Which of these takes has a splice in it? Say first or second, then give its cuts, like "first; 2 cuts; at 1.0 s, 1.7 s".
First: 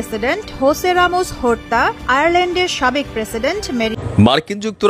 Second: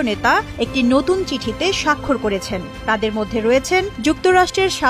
first; 1 cut; at 3.9 s